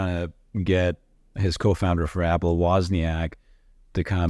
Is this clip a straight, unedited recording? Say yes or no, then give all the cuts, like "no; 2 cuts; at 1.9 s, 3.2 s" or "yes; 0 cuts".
yes; 0 cuts